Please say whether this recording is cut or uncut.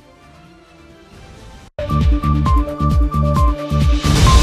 cut